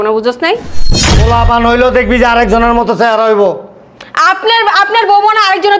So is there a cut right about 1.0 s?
yes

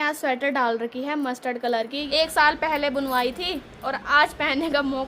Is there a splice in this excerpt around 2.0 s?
yes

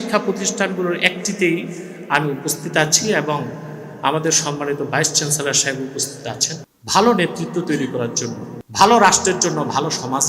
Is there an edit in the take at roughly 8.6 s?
yes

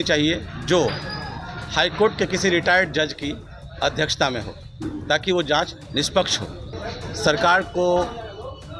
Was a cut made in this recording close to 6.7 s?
yes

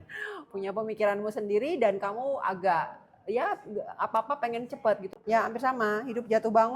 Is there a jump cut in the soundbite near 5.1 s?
yes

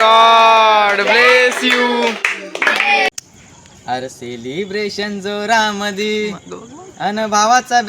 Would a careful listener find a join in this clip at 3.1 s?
yes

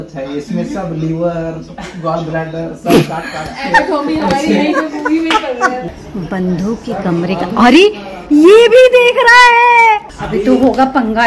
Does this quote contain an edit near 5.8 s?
yes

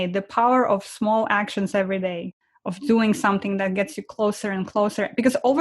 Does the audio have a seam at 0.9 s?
no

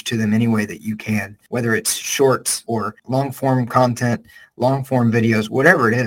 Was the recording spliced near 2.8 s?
yes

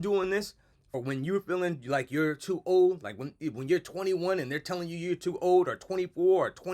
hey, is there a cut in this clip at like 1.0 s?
yes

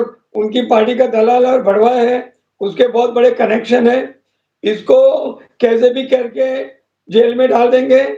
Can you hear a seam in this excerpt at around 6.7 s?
no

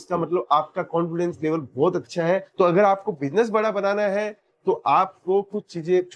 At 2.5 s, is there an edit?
yes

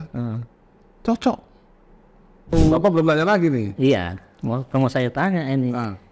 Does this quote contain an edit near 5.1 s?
no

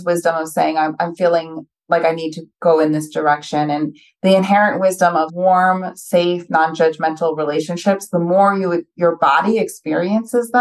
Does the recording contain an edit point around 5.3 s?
yes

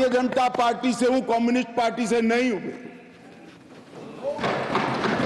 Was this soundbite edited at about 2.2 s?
no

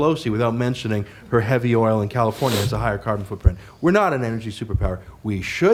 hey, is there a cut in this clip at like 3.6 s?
no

